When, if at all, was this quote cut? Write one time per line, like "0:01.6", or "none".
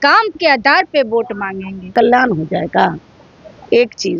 0:01.9